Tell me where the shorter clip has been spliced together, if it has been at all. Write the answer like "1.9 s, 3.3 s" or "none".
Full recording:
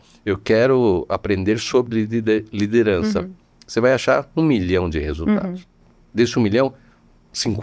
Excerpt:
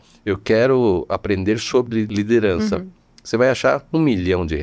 2.1 s